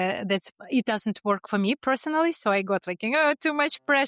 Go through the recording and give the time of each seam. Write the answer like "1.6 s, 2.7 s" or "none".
none